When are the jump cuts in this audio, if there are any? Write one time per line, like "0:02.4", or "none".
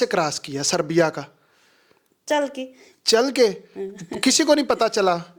none